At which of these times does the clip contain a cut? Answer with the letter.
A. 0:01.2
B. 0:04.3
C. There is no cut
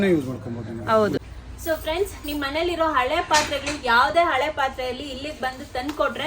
A